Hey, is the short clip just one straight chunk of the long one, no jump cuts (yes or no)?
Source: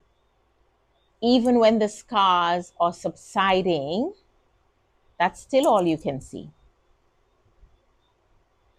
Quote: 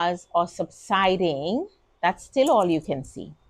no